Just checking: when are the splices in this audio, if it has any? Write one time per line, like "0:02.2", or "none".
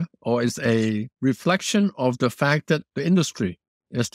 0:01.1
0:02.9